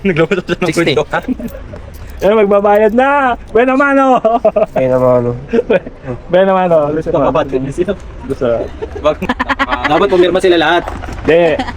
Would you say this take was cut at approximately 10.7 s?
no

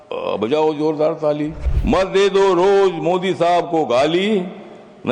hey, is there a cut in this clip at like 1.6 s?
yes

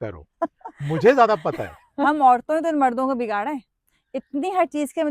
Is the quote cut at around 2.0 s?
yes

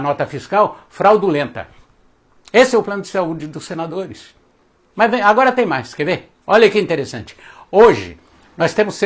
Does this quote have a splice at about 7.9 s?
yes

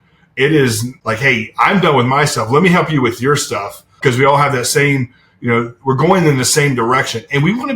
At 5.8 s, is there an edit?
no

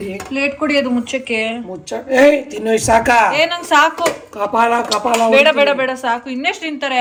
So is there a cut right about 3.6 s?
no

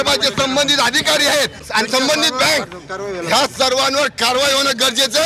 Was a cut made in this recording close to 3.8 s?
no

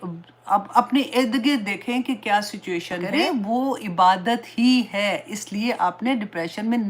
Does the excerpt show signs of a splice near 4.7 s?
no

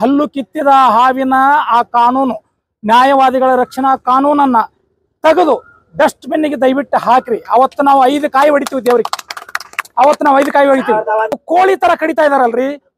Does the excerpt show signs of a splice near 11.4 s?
yes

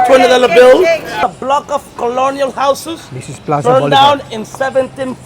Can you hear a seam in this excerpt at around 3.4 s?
no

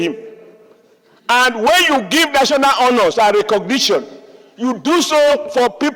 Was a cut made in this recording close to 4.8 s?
no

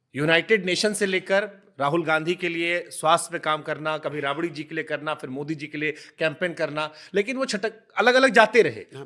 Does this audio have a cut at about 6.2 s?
no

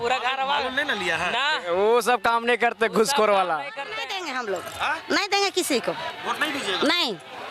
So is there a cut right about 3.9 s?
yes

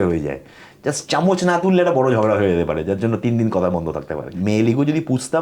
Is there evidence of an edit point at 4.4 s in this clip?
yes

